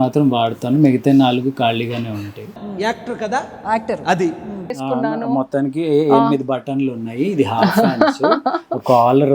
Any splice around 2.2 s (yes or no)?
no